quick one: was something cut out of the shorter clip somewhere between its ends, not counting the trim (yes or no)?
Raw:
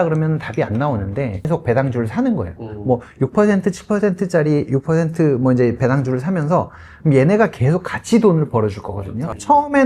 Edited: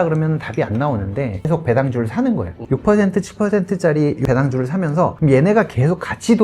yes